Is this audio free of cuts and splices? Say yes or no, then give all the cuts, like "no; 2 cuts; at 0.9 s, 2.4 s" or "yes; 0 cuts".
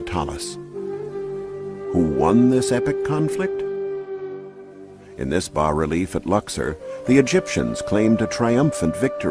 no; 1 cut; at 6.9 s